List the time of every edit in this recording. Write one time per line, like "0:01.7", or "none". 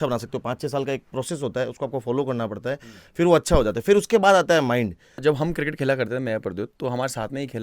0:05.2